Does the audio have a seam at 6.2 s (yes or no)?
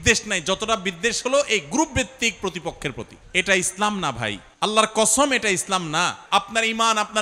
yes